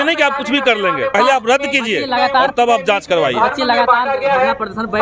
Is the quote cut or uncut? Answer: cut